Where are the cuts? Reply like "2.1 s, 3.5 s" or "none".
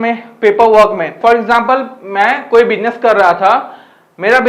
1.2 s